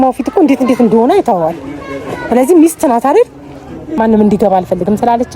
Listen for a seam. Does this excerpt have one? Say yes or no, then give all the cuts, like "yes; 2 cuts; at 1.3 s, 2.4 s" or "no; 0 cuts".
yes; 1 cut; at 4.0 s